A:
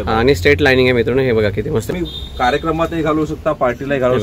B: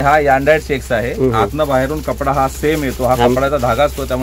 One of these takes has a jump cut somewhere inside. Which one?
A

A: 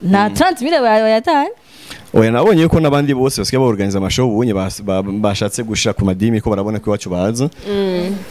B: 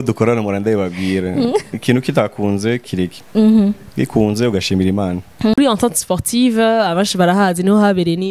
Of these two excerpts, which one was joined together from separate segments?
B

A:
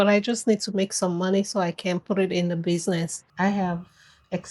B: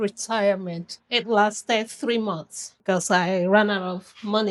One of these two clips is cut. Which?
A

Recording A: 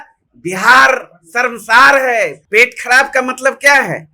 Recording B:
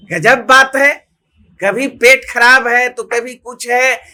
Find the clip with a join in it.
A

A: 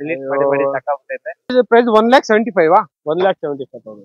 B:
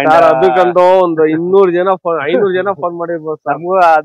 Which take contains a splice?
A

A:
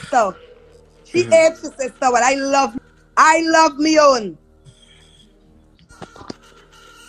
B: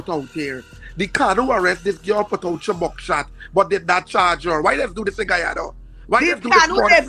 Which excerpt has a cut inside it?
A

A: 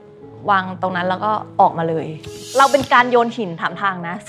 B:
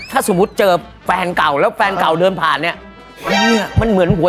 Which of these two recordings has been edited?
A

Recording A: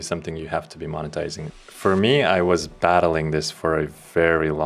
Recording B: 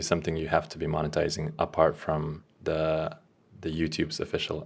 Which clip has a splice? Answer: A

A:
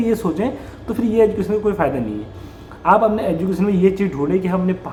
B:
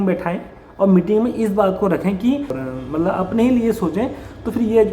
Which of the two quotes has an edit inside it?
B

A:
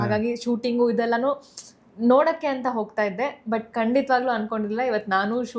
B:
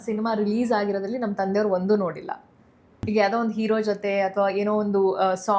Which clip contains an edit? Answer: B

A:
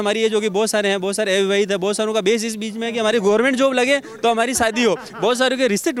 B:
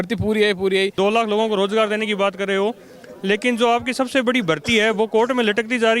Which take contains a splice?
B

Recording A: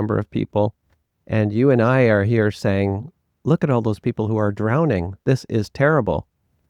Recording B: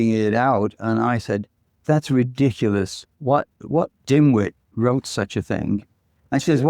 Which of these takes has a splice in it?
B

